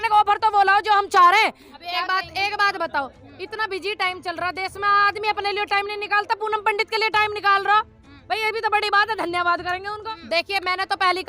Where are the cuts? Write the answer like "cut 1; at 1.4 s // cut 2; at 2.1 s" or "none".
cut 1; at 1.7 s // cut 2; at 10.1 s